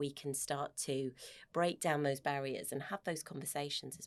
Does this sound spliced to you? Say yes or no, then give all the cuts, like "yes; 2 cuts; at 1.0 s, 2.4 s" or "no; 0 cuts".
no; 0 cuts